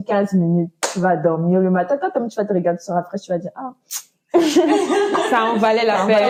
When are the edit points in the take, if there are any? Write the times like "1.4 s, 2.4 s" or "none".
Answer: none